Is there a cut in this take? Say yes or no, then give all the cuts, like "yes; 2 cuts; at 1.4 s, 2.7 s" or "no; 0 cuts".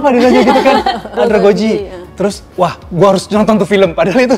yes; 1 cut; at 1.2 s